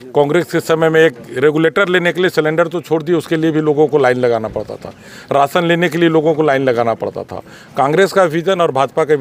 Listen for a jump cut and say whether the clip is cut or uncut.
uncut